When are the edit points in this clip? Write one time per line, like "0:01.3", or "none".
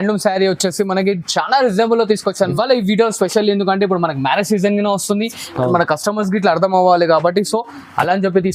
0:02.5